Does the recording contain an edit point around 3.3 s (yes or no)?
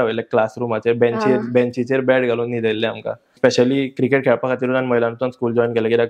yes